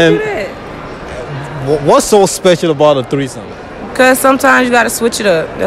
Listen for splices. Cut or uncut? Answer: uncut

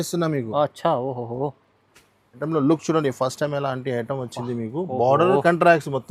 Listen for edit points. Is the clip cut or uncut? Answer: cut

